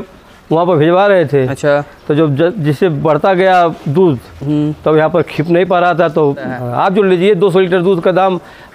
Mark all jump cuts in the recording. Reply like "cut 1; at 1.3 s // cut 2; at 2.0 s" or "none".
cut 1; at 6.6 s